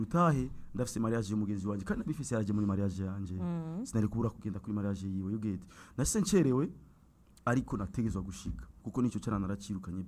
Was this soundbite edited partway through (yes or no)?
no